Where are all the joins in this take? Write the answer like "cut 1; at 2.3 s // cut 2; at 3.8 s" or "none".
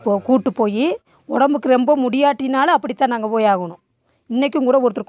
none